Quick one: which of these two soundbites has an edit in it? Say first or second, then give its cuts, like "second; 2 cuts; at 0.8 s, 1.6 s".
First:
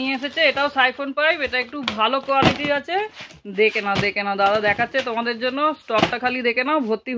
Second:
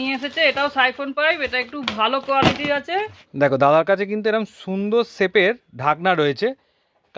second; 1 cut; at 3.2 s